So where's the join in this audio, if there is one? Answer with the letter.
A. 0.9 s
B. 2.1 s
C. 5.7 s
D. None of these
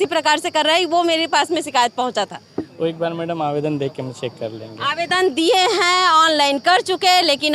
D